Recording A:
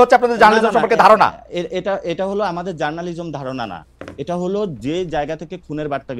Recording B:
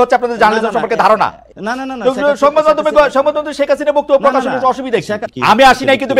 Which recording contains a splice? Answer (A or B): B